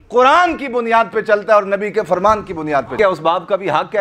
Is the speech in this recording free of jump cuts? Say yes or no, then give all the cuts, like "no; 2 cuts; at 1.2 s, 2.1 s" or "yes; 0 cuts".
no; 1 cut; at 3.0 s